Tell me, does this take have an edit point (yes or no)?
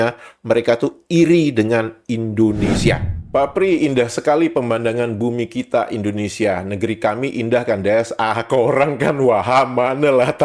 yes